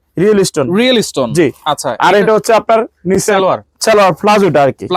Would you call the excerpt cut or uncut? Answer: uncut